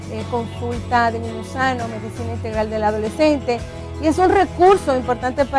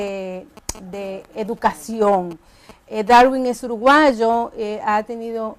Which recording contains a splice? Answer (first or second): second